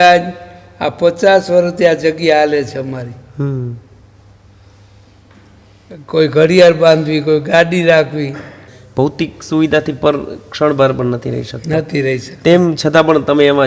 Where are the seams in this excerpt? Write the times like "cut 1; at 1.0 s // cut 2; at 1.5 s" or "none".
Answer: cut 1; at 9.1 s

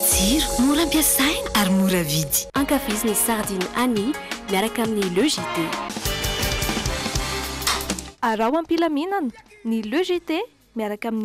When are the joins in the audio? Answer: none

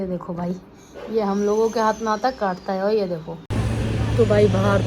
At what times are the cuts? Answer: cut 1; at 3.4 s

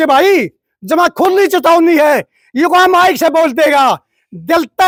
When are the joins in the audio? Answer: none

